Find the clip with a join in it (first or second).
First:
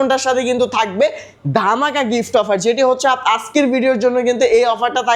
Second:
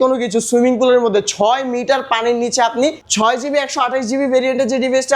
second